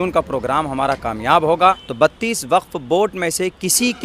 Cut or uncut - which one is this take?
cut